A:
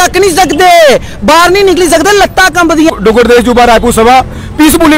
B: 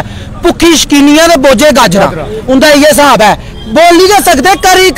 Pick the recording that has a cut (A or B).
A